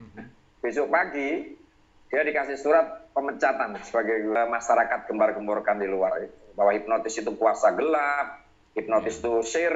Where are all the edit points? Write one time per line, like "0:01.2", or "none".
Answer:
0:04.4